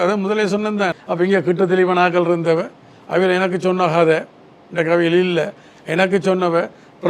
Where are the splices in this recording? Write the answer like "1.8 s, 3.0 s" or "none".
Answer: 1.0 s